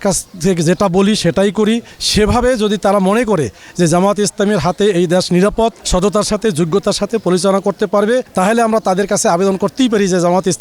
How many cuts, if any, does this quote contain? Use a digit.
2